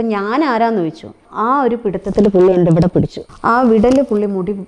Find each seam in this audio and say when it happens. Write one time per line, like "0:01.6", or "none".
0:01.2
0:03.2